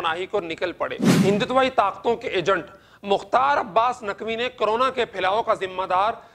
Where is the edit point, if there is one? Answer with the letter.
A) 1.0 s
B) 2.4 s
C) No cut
A